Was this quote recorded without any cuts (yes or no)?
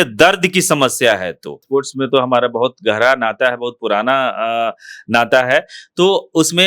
no